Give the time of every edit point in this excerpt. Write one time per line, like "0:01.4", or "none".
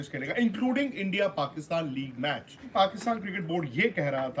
0:02.7